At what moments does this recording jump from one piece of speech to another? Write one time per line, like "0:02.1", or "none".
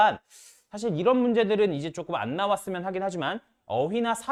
none